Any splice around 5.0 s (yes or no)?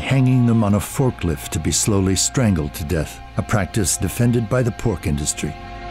no